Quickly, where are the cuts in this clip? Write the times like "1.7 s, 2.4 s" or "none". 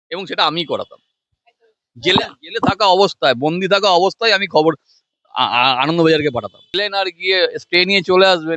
6.7 s